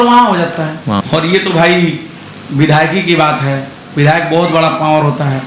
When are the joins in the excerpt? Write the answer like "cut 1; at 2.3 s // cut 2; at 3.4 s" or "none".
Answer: cut 1; at 1.0 s